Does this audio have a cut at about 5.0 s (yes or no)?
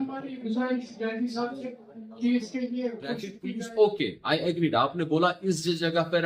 no